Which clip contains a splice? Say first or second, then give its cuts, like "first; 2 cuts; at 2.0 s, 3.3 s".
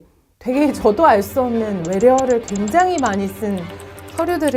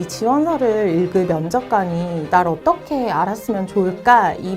second; 1 cut; at 3.7 s